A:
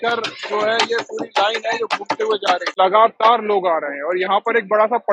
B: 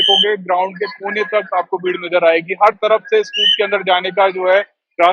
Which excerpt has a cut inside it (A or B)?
A